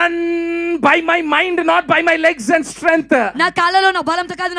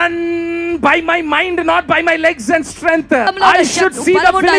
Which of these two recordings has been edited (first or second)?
second